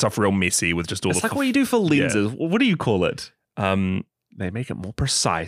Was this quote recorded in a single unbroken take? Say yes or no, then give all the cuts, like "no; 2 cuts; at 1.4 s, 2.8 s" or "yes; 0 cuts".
no; 1 cut; at 4.2 s